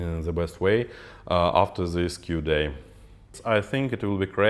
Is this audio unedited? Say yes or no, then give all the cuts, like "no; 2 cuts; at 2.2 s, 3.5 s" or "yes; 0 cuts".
no; 1 cut; at 3.3 s